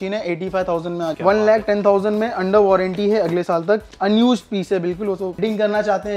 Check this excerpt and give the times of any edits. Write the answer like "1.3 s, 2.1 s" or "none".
1.2 s, 5.4 s